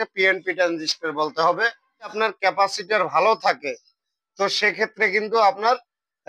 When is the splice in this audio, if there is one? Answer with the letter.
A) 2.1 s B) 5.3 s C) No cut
A